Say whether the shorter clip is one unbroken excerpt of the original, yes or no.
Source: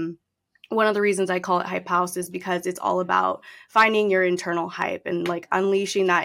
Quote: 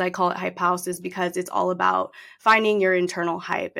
yes